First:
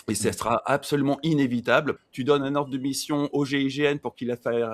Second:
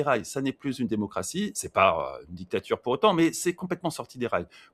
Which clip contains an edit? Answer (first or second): first